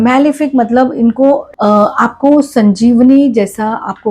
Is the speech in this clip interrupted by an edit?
yes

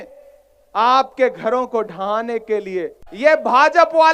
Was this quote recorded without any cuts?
no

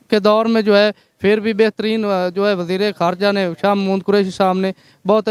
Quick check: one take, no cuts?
yes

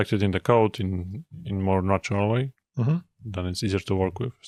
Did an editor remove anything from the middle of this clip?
no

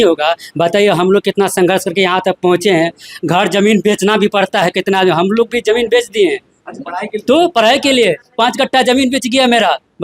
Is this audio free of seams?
yes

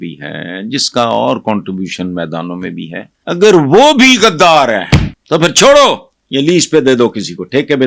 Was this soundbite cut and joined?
yes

